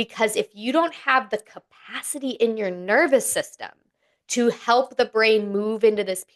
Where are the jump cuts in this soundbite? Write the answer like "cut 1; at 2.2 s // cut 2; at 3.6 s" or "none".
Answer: none